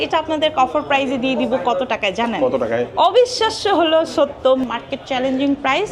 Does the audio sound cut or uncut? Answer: cut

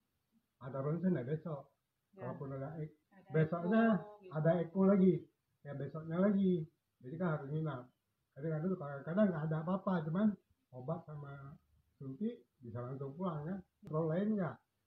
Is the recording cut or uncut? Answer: cut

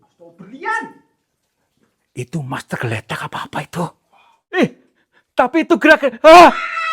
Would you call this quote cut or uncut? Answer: cut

